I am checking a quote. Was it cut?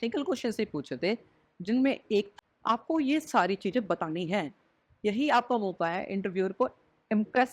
yes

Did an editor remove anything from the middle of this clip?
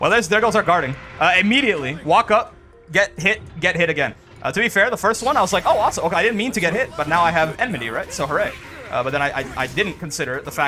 no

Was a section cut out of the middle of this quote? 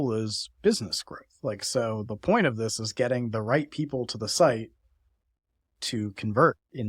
no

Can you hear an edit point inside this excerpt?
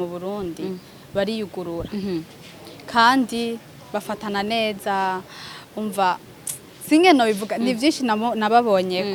no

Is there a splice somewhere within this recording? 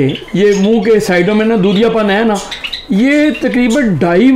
no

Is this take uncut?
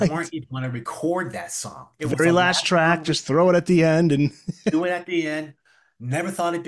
yes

